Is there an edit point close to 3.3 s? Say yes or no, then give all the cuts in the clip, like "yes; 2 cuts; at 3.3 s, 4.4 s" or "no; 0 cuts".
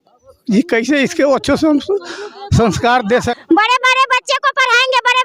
yes; 1 cut; at 3.3 s